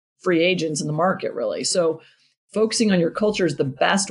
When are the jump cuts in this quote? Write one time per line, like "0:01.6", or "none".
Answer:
none